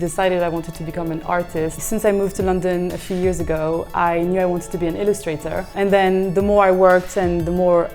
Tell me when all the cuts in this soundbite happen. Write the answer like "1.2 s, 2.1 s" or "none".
1.8 s, 5.7 s